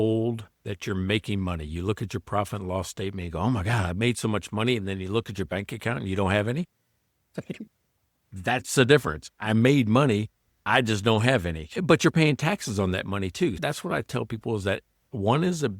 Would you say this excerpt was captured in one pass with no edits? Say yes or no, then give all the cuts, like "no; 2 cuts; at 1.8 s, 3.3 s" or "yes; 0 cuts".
yes; 0 cuts